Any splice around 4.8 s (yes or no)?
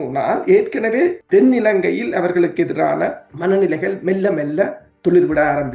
no